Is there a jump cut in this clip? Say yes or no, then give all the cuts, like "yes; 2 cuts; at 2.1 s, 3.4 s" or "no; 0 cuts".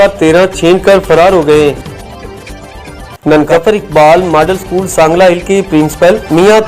yes; 2 cuts; at 1.8 s, 3.5 s